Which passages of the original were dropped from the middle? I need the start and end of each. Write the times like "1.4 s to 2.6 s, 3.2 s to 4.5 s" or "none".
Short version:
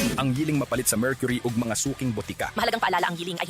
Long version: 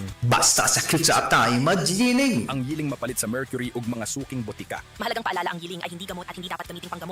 4.8 s to 4.9 s